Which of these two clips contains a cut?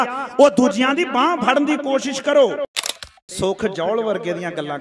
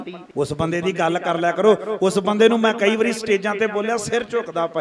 first; 1 cut; at 2.7 s

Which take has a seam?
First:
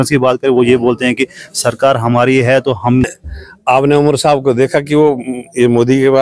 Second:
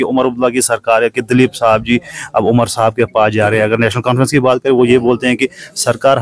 first; 1 cut; at 3.1 s

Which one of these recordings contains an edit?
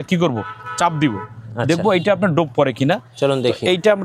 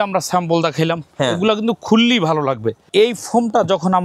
second; 1 cut; at 2.8 s

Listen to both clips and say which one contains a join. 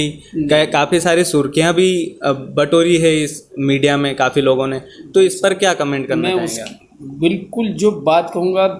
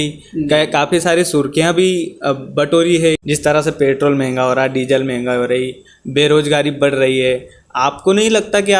second; 1 cut; at 3.2 s

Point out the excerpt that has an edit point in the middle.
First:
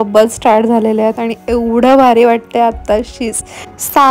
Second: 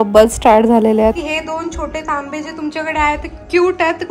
second; 1 cut; at 1.2 s

